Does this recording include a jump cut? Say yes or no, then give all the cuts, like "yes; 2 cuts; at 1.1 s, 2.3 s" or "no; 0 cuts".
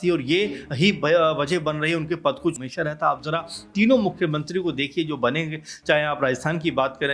yes; 1 cut; at 2.6 s